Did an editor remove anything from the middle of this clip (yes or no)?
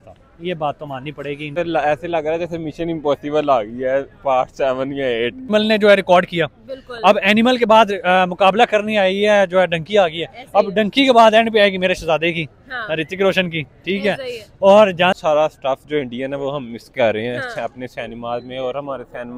yes